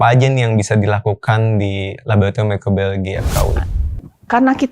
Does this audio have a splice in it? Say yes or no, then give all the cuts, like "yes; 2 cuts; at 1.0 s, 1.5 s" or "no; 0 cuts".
yes; 1 cut; at 3.6 s